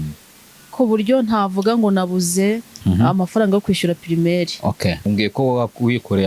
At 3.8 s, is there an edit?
no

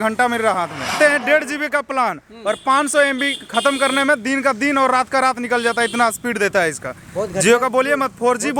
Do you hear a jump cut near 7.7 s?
no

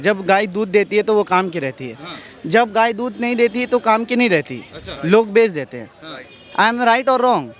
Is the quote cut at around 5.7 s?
no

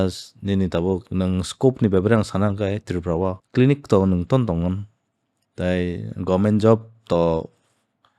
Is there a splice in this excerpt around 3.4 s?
yes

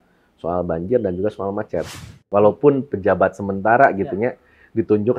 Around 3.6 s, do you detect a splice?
no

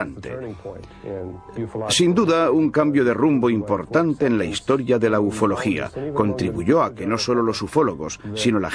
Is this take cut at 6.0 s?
no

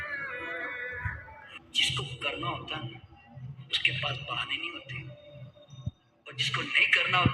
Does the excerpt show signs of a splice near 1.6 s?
yes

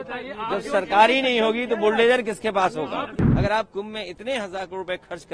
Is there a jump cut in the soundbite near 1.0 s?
no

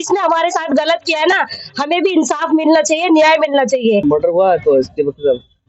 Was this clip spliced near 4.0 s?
yes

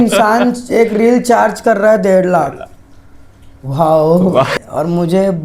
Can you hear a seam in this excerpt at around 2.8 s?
no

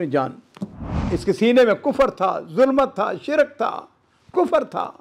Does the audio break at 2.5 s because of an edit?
no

